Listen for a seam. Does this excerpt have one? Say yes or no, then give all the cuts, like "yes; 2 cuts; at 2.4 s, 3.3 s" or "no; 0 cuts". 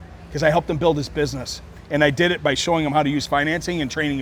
no; 0 cuts